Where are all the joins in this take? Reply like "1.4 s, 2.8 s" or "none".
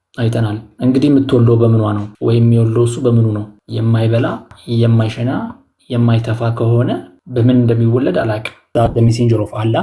2.1 s, 3.6 s, 4.5 s, 7.2 s, 8.6 s